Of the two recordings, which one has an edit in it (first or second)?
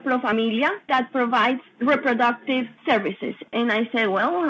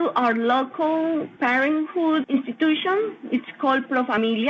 first